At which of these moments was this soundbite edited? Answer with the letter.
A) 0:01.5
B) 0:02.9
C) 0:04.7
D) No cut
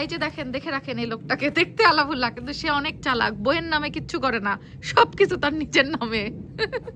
D